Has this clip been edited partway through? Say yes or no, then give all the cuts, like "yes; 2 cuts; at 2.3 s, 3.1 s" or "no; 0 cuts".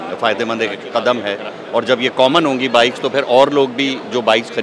no; 0 cuts